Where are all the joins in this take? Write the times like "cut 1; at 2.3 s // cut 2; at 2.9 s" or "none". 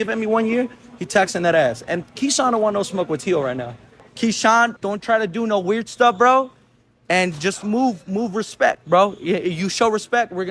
cut 1; at 4.1 s // cut 2; at 4.8 s